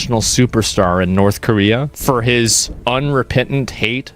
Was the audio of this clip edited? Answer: no; 0 cuts

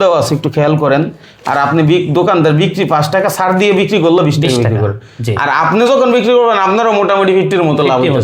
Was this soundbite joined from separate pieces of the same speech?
no; 0 cuts

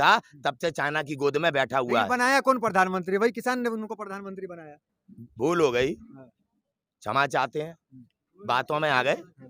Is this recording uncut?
yes; 0 cuts

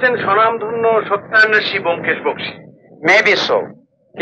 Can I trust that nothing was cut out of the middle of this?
yes; 0 cuts

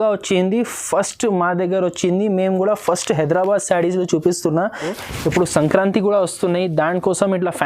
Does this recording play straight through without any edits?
no; 1 cut; at 4.9 s

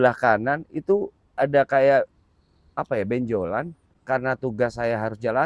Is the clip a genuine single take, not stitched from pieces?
no; 1 cut; at 3.9 s

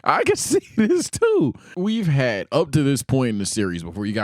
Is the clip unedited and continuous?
no; 1 cut; at 1.7 s

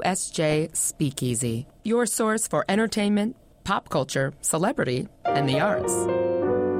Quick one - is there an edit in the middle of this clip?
no; 0 cuts

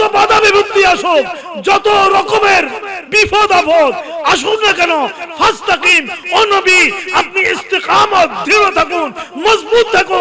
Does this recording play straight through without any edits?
yes; 0 cuts

